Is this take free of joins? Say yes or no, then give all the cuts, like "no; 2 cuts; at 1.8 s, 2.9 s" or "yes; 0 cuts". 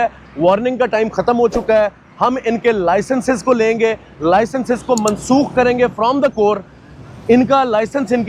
yes; 0 cuts